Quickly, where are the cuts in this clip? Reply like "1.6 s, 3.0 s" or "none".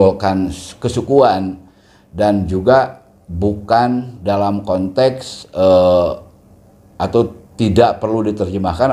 none